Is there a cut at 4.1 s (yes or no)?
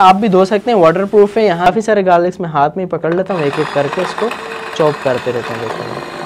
no